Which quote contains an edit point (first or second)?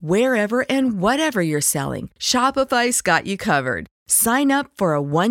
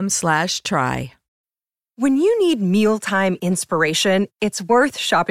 second